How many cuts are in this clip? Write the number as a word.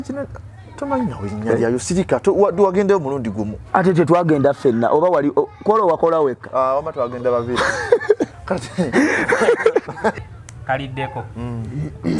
one